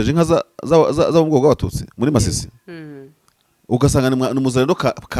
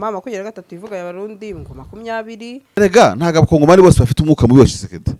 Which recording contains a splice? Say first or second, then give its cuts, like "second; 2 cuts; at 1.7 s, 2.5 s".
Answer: second; 1 cut; at 2.5 s